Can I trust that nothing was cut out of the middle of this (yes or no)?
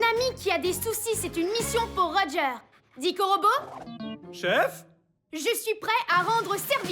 yes